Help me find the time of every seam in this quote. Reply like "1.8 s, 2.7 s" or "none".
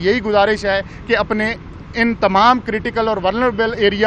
none